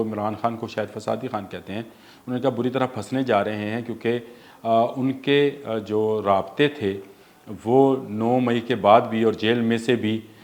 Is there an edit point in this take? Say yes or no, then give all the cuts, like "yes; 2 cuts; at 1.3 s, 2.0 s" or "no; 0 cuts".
no; 0 cuts